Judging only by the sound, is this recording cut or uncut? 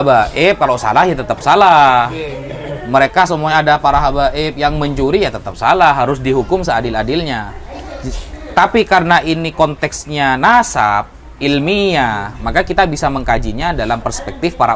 uncut